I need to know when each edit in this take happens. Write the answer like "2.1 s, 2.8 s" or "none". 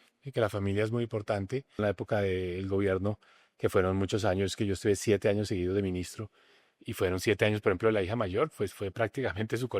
1.8 s